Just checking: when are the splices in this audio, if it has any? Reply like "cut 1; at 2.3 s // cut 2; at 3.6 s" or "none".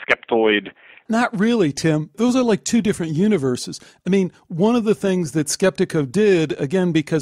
cut 1; at 1.0 s // cut 2; at 2.1 s